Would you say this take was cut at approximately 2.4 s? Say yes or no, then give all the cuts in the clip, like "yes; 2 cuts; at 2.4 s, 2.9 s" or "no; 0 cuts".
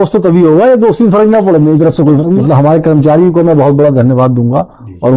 yes; 1 cut; at 2.4 s